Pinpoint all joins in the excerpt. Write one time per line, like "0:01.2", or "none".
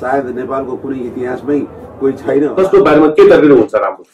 0:02.6